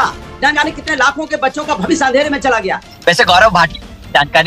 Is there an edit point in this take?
yes; 1 cut; at 2.9 s

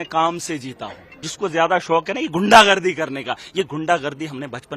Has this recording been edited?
yes; 1 cut; at 1.2 s

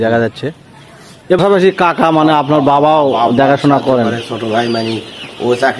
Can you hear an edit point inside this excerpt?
yes; 1 cut; at 1.4 s

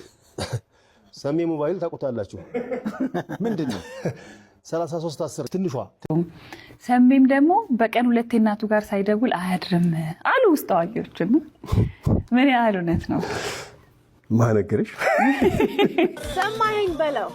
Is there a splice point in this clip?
yes; 2 cuts; at 5.9 s, 16.1 s

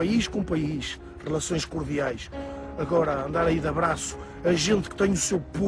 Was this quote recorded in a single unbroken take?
yes; 0 cuts

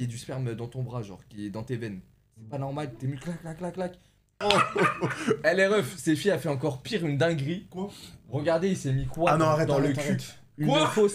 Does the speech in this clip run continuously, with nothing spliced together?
no; 1 cut; at 4.4 s

